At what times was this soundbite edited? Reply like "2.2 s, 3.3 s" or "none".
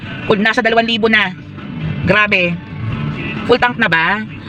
none